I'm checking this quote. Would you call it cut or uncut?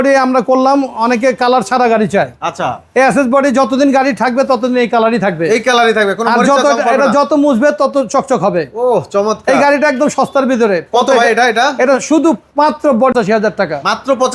cut